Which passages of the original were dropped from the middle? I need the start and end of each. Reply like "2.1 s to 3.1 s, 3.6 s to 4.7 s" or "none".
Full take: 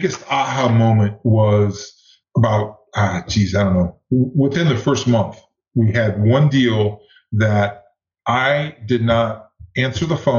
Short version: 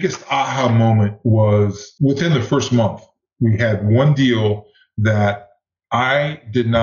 2.0 s to 4.3 s